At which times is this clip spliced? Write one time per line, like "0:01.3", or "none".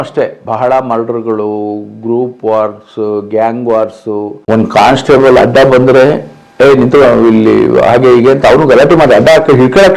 0:04.4

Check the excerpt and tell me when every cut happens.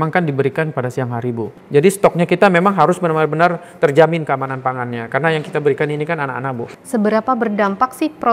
0:01.5
0:06.7

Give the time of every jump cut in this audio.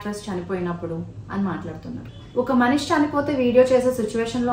0:02.1

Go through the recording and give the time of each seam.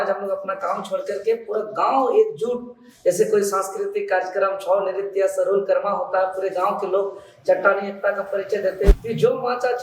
0:08.9

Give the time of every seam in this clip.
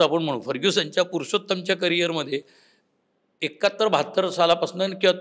none

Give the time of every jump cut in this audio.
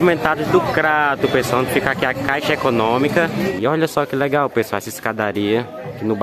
0:03.5

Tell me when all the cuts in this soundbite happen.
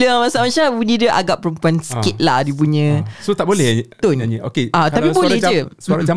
none

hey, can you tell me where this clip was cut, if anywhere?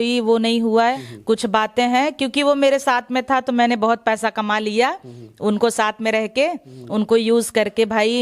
0:01.0

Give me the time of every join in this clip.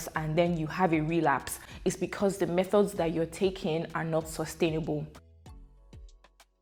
none

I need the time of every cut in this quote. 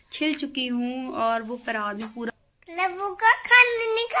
0:02.3

